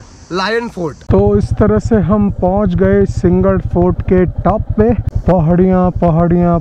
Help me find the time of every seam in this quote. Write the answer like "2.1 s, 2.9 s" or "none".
0.9 s, 5.1 s